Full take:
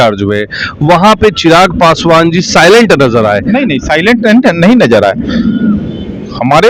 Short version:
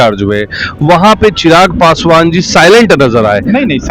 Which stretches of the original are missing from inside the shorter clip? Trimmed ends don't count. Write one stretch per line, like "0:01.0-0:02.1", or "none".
none